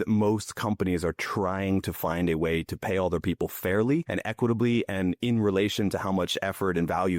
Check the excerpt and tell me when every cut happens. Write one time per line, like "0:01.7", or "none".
0:04.1